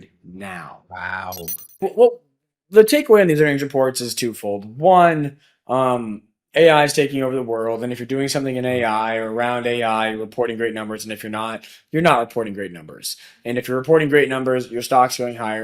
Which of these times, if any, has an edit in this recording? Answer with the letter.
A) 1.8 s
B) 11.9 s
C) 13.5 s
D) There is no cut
A